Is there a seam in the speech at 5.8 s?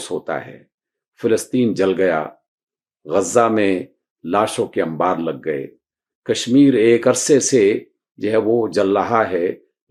no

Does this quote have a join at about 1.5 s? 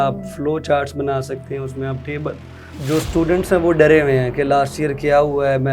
no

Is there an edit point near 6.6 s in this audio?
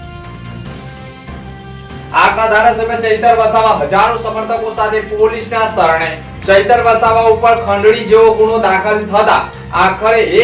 no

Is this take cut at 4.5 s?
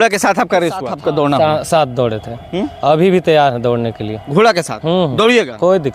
no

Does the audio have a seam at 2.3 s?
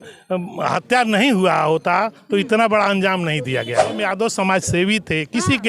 no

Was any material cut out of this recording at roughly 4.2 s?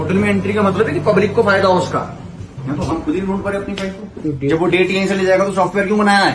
yes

